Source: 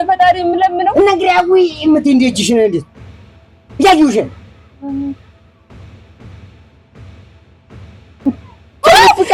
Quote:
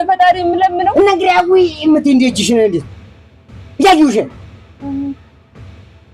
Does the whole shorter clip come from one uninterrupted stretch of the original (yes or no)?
no